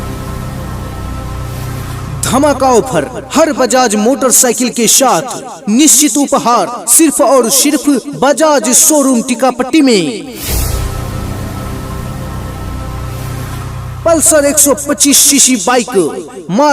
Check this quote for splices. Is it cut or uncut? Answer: cut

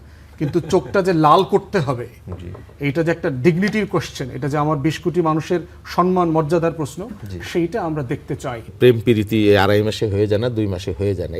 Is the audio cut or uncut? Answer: cut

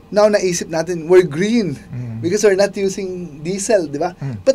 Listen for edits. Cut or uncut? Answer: uncut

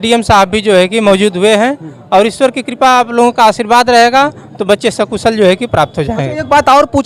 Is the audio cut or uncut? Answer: uncut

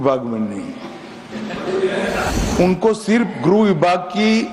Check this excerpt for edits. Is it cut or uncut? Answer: cut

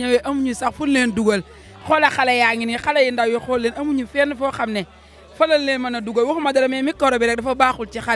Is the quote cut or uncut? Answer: uncut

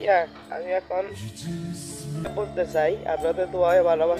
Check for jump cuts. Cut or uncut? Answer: cut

